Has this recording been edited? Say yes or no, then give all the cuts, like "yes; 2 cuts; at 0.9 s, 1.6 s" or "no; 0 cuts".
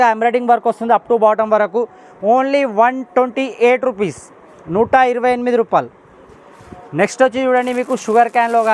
no; 0 cuts